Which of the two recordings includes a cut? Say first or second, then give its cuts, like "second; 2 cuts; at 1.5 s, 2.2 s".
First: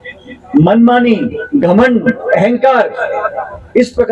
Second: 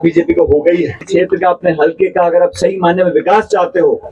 second; 1 cut; at 1.1 s